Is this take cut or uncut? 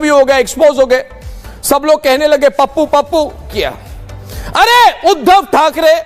cut